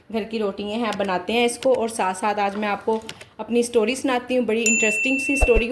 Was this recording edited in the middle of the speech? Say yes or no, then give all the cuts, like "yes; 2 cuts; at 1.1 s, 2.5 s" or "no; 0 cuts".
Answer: no; 0 cuts